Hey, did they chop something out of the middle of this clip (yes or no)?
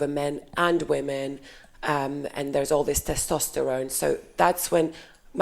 no